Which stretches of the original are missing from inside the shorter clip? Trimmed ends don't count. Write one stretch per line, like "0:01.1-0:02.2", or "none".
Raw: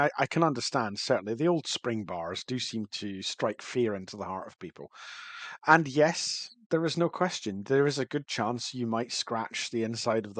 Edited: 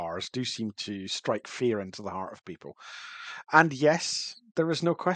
none